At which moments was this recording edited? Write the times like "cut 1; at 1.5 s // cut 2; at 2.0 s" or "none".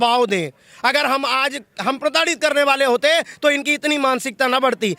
none